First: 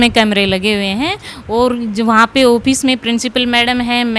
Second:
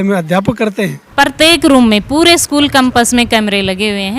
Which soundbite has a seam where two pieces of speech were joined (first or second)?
second